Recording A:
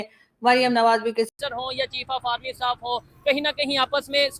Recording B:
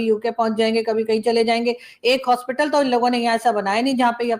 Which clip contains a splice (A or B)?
A